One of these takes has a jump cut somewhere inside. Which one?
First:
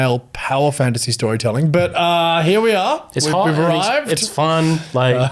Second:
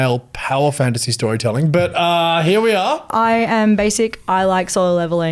second; 1 cut; at 3.1 s

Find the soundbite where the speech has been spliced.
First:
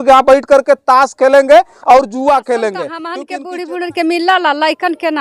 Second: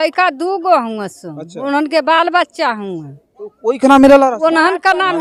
first; 1 cut; at 3.2 s

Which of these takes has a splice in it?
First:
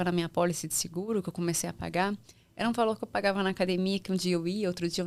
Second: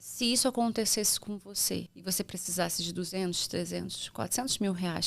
second; 1 cut; at 1.9 s

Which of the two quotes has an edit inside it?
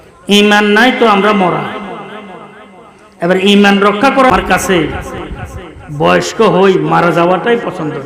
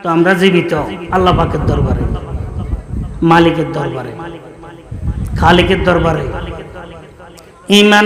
first; 1 cut; at 4.3 s

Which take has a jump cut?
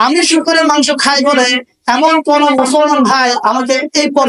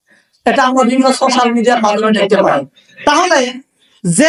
second; 1 cut; at 2.8 s

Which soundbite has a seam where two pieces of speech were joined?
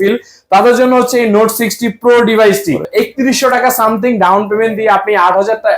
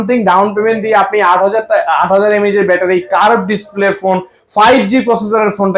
first; 1 cut; at 2.9 s

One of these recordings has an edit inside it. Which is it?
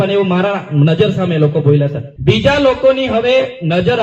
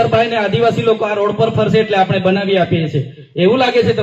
first; 1 cut; at 2.1 s

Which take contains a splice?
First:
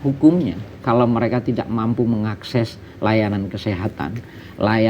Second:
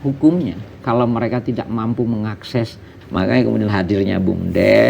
second; 1 cut; at 2.9 s

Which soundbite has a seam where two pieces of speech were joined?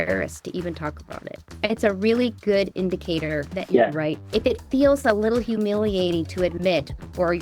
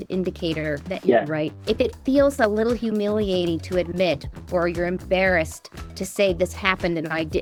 first; 1 cut; at 1.6 s

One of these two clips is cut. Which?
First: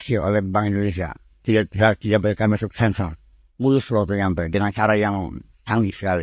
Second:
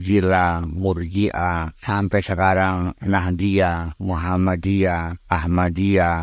second; 2 cuts; at 1.7 s, 5.1 s

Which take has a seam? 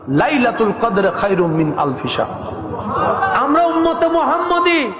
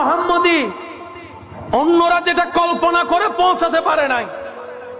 first; 1 cut; at 3.3 s

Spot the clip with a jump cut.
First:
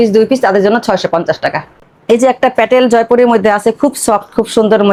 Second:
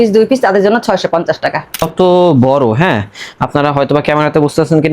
second; 1 cut; at 1.9 s

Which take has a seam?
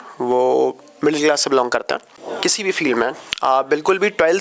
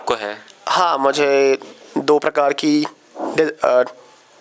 first; 1 cut; at 2.3 s

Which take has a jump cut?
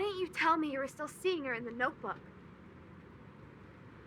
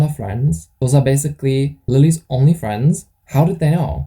second; 2 cuts; at 1.8 s, 3.1 s

